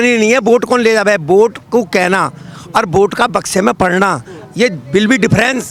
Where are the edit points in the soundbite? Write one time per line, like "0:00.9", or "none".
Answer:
none